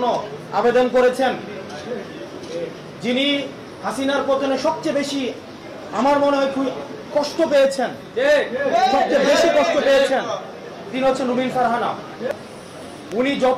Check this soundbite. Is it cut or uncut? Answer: cut